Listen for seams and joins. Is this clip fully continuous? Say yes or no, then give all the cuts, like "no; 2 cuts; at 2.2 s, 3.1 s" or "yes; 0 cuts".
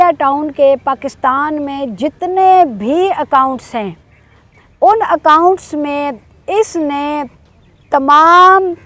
yes; 0 cuts